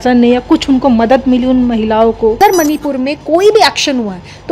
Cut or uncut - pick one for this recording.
cut